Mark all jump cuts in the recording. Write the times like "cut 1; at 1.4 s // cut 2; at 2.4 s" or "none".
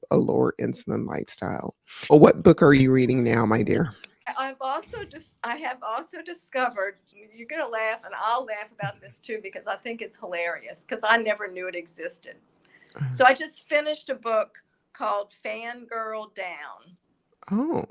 cut 1; at 2.1 s // cut 2; at 4.3 s